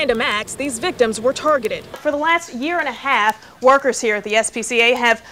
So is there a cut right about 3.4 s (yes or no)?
no